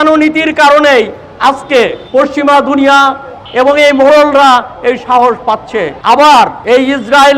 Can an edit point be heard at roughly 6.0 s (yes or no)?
yes